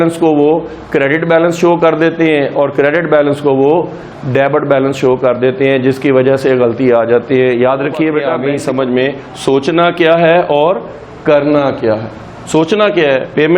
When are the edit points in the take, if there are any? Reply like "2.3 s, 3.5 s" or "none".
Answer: 8.4 s